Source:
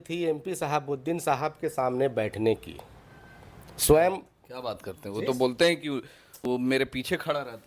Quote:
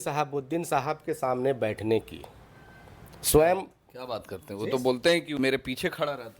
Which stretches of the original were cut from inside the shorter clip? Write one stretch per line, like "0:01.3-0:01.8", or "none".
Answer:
0:05.9-0:06.7